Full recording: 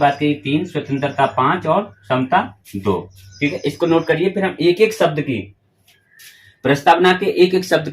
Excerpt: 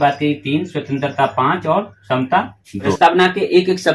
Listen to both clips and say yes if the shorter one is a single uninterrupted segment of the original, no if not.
no